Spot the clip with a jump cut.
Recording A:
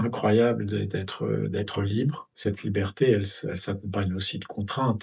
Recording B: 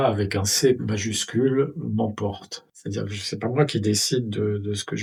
A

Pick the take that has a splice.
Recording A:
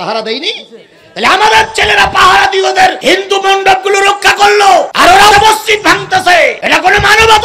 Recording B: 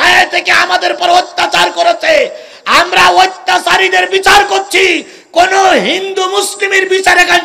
A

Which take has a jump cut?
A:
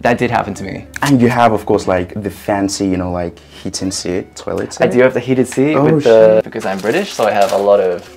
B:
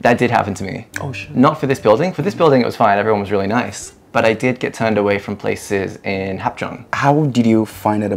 A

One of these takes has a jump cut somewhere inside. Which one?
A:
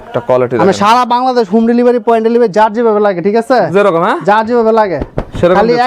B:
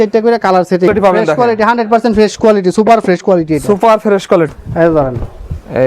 B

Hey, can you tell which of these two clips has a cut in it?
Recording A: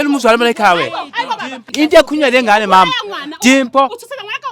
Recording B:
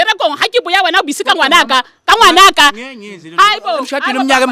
A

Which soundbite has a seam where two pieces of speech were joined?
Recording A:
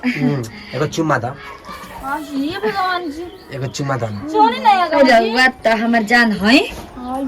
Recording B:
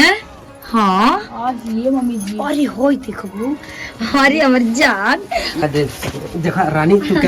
B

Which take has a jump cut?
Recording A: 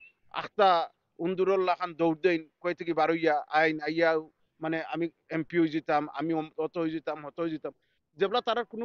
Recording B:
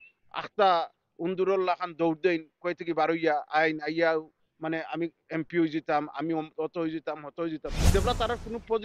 B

